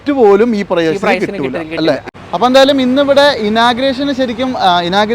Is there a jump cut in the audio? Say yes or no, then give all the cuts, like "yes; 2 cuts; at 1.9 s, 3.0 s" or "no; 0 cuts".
yes; 1 cut; at 2.3 s